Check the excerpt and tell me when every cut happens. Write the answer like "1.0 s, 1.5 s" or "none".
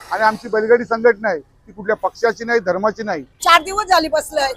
3.3 s